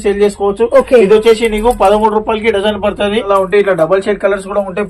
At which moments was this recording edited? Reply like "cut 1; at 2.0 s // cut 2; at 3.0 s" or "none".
cut 1; at 3.3 s